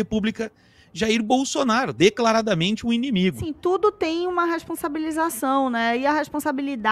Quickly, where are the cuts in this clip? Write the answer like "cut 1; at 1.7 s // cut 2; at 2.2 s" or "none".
cut 1; at 3.5 s